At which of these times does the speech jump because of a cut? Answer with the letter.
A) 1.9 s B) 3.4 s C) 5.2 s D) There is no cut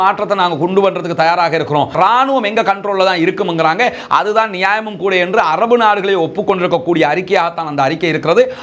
A